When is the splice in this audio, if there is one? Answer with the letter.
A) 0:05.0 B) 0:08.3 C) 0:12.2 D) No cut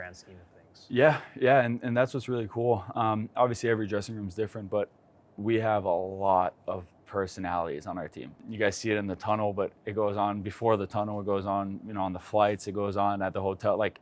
B